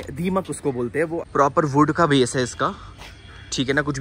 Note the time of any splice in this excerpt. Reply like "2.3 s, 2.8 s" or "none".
1.2 s